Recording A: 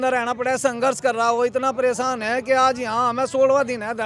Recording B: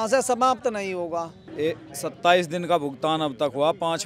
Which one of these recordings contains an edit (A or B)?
B